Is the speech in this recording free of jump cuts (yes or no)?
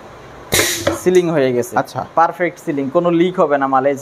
yes